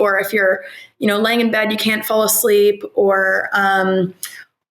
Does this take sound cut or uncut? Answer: uncut